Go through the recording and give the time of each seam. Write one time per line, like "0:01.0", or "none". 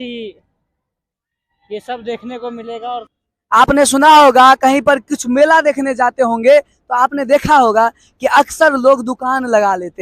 0:03.1

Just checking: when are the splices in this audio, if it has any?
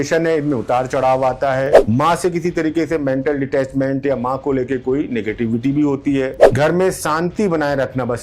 0:01.8
0:06.4

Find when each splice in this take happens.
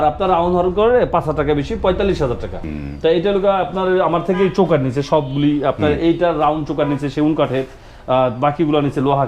0:02.6

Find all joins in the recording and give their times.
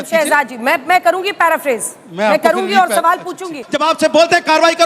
0:03.6

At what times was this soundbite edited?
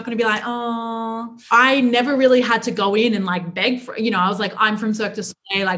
0:01.3

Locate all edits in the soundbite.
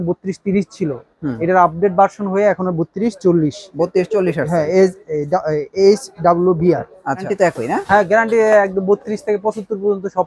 0:07.3

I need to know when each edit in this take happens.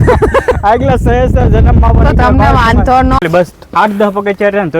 0:03.2

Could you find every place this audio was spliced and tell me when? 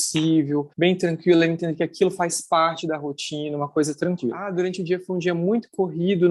0:04.4

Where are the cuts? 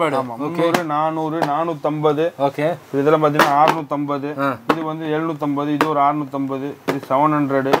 none

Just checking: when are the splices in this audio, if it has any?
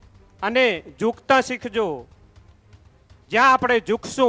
none

